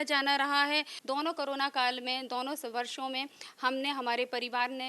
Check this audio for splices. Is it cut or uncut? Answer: cut